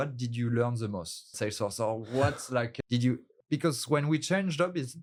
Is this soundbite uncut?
yes; 0 cuts

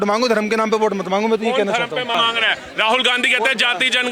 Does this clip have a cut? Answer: yes; 1 cut; at 2.2 s

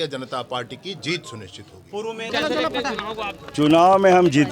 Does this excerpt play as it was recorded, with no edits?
no; 1 cut; at 2.2 s

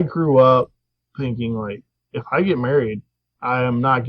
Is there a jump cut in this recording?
no; 0 cuts

